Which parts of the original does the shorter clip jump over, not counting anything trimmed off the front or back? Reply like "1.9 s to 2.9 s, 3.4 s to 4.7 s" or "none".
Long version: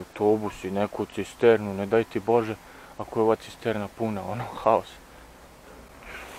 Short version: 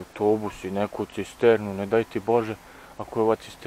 none